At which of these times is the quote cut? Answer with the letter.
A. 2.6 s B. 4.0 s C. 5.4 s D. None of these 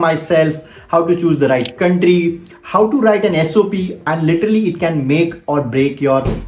B